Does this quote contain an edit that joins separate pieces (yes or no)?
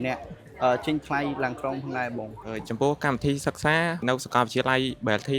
yes